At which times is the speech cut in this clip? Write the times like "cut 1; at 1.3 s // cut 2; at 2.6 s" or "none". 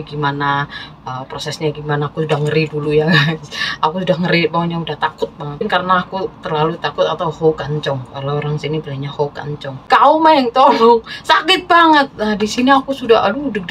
cut 1; at 5.6 s // cut 2; at 9.8 s